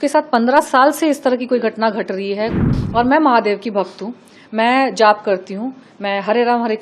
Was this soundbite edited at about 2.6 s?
yes; 1 cut; at 2.6 s

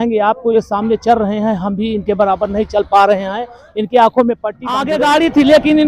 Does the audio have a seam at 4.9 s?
yes; 1 cut; at 4.9 s

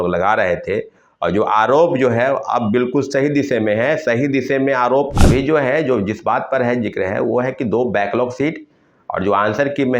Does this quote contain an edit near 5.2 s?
yes; 1 cut; at 5.2 s

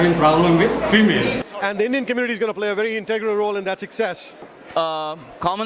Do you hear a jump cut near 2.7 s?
no; 2 cuts; at 1.4 s, 4.5 s

